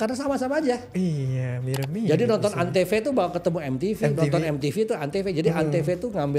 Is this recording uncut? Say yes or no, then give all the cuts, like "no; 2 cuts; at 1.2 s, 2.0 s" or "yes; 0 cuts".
yes; 0 cuts